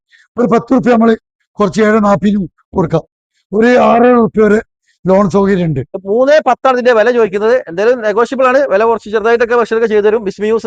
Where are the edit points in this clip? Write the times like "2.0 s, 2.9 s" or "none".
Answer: 5.9 s